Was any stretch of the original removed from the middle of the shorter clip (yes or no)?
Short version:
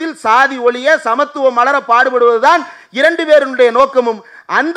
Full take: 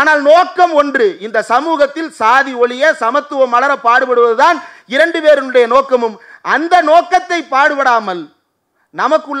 no